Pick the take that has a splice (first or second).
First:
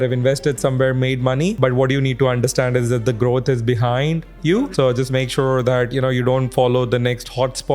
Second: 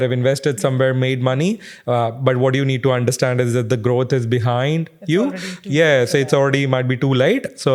first